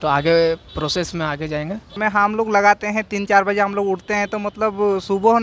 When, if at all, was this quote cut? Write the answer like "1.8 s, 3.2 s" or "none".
2.0 s